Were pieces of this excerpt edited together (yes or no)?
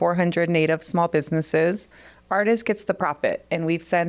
no